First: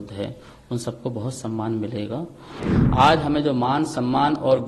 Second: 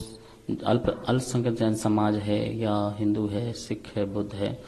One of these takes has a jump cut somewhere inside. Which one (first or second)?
first